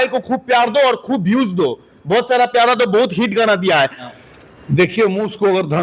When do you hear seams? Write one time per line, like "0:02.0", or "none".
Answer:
0:04.0